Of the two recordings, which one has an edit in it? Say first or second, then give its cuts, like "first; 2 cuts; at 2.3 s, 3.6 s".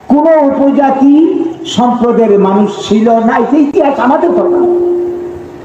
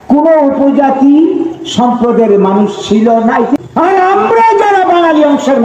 second; 1 cut; at 3.5 s